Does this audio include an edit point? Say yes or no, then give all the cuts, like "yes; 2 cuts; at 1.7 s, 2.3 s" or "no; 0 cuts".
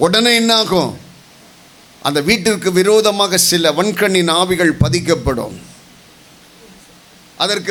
no; 0 cuts